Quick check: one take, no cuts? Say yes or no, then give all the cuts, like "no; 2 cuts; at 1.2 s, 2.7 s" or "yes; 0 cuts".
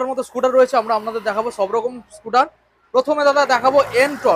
yes; 0 cuts